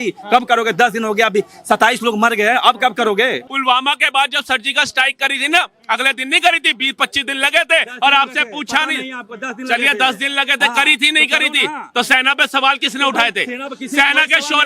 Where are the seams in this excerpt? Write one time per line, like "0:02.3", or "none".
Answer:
0:03.4